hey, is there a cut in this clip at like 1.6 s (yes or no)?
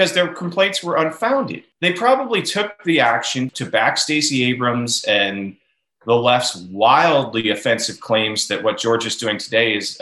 yes